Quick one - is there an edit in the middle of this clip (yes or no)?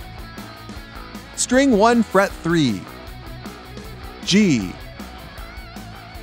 no